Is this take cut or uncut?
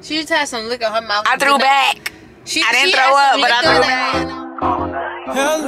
cut